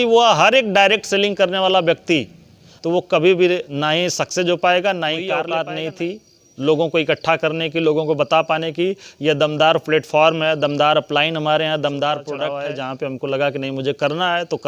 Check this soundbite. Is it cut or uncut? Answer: cut